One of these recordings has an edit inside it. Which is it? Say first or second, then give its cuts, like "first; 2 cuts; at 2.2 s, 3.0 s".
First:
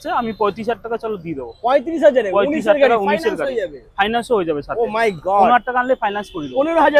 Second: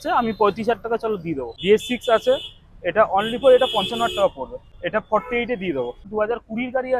second; 3 cuts; at 1.4 s, 4.7 s, 6.1 s